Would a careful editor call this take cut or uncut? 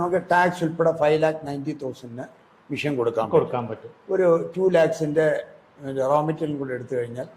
uncut